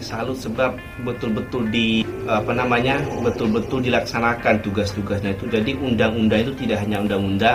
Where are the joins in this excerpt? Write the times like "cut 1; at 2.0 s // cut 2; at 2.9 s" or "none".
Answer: none